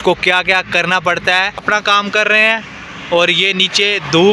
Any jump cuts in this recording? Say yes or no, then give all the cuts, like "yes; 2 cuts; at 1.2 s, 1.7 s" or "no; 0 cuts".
yes; 1 cut; at 1.6 s